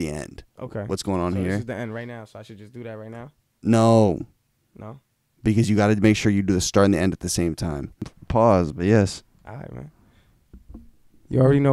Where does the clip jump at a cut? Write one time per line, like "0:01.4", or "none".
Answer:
0:08.1